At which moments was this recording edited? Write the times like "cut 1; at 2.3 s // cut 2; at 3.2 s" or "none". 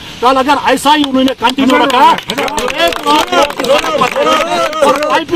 none